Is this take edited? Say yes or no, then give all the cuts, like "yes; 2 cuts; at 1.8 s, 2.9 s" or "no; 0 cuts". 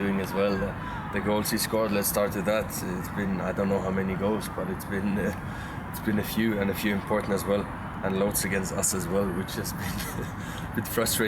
no; 0 cuts